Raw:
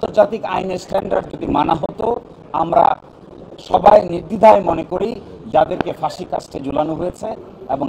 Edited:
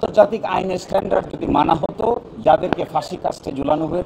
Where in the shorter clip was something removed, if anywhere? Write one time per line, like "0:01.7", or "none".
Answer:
0:02.3